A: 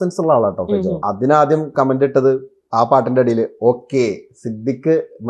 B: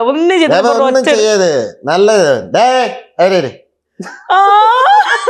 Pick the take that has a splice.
A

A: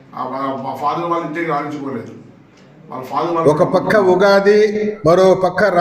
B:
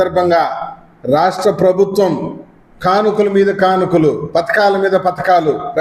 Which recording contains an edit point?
A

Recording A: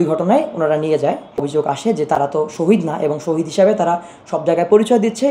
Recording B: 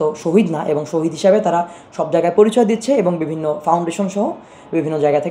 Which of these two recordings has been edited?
A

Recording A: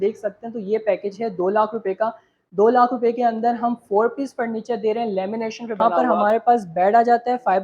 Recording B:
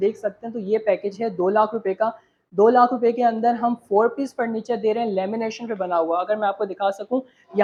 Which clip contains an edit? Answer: A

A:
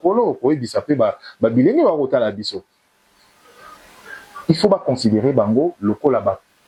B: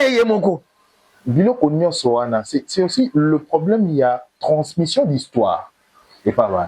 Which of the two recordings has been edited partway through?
B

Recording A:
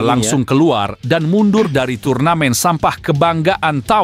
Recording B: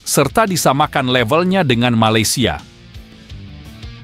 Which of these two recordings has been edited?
B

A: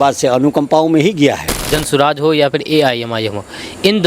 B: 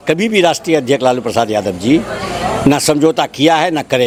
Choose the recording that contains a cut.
A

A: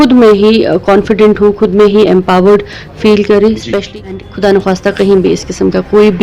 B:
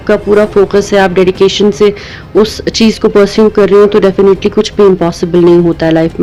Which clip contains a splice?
A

